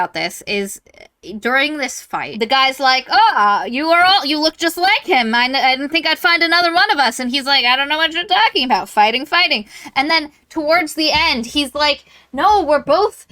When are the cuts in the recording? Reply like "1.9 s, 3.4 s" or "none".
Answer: 2.3 s